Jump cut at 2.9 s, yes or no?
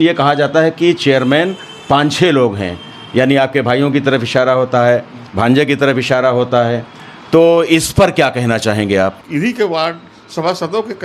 no